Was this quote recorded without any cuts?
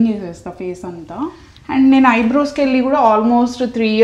no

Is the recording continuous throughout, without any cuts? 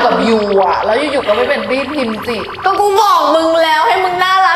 yes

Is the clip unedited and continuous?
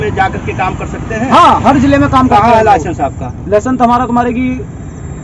yes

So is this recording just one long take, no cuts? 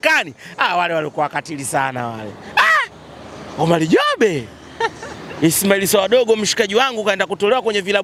yes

